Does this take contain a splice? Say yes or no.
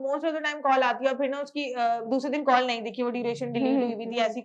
no